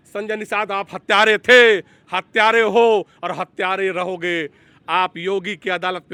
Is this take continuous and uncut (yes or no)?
yes